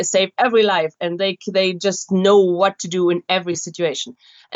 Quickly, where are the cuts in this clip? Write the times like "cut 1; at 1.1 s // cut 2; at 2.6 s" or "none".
none